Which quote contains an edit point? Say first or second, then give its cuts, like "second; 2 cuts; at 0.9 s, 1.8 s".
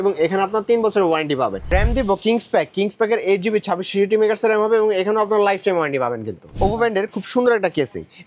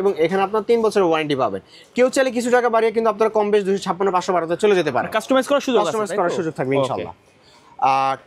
first; 2 cuts; at 1.7 s, 6.4 s